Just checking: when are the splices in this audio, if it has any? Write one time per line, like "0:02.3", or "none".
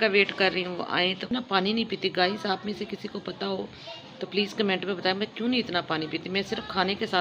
0:01.3